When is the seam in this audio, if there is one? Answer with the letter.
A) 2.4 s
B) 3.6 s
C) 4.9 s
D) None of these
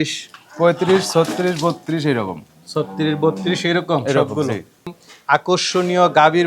C